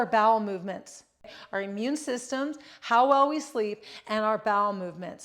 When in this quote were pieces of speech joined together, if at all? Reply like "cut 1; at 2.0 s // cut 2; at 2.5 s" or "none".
cut 1; at 1.4 s